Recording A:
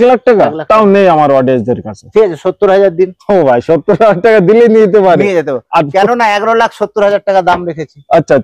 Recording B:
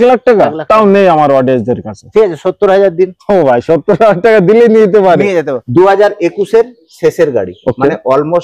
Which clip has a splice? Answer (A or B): B